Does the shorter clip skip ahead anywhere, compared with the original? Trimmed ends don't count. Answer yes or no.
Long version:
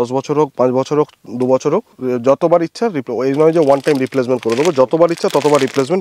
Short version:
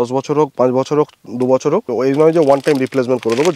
yes